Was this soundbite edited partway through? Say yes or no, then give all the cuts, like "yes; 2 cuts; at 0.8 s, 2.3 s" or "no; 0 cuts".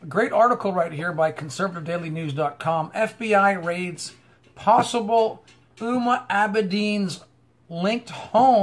yes; 1 cut; at 3.4 s